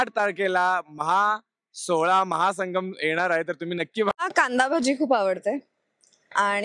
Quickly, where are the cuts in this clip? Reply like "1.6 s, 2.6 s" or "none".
4.2 s